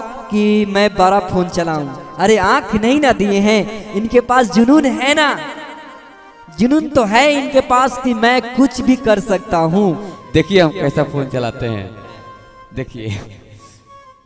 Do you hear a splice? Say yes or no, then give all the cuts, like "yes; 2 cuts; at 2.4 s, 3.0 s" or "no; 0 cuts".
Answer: yes; 1 cut; at 10.1 s